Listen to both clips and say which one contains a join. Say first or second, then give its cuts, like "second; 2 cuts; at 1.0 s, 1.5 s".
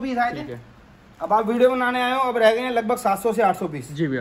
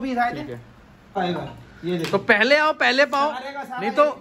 second; 1 cut; at 1.1 s